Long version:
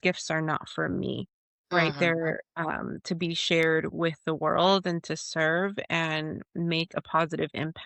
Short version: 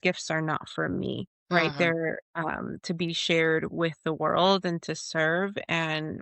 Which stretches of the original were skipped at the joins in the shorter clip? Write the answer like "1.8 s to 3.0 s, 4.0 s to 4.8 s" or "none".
1.3 s to 1.5 s